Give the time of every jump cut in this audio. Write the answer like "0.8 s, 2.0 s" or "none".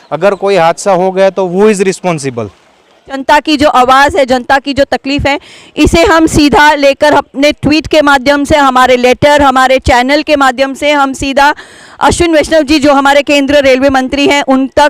3.2 s